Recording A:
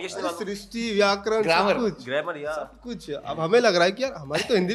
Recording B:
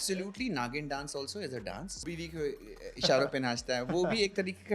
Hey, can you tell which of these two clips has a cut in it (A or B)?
B